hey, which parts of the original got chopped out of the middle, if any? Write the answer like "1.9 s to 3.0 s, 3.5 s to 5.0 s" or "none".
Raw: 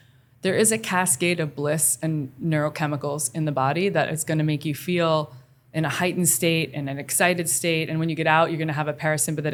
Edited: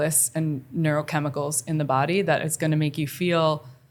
none